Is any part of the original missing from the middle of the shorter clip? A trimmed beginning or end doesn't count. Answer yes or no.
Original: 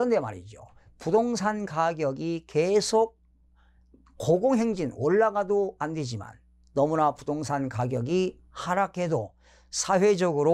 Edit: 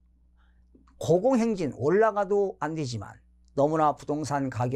no